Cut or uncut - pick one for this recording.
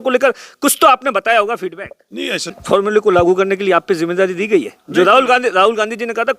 cut